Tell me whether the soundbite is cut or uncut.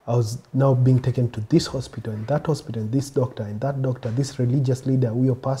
uncut